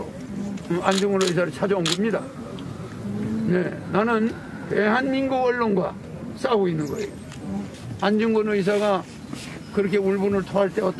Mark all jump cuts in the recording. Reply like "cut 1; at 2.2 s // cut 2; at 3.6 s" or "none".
cut 1; at 7.7 s